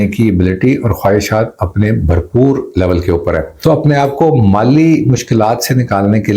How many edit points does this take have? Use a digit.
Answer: 1